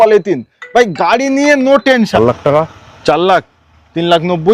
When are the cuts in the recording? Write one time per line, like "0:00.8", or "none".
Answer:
0:02.1